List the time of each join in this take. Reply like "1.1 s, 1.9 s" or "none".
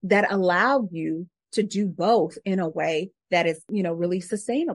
3.6 s

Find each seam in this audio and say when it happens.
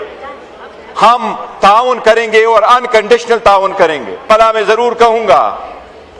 4.2 s

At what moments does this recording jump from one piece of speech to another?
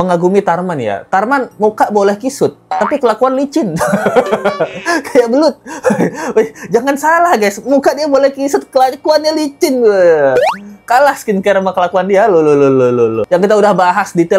none

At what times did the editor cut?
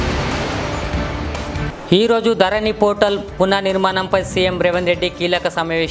1.4 s

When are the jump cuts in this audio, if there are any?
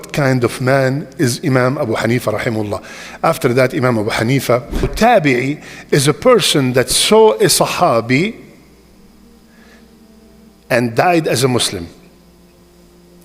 4.9 s

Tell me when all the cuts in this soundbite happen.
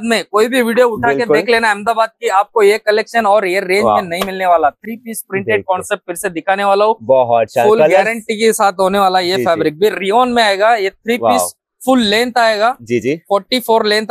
none

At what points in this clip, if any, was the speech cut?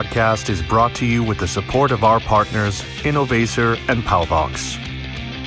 4.5 s

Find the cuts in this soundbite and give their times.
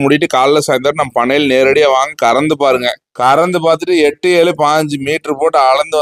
none

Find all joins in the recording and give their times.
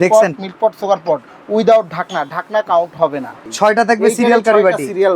3.4 s

